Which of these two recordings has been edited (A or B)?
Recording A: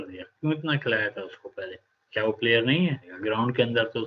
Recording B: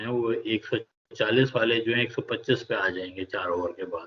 A